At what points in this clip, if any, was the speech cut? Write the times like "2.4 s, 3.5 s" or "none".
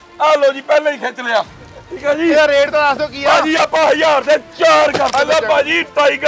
5.2 s